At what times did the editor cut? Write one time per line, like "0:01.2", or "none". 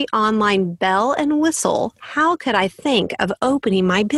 0:02.0